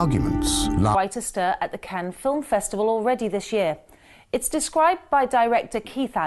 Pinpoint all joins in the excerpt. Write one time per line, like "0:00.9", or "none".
none